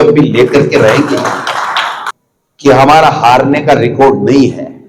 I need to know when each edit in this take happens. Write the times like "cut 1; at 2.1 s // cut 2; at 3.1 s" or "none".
cut 1; at 2.1 s